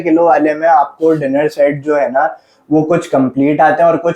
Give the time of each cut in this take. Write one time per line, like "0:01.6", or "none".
none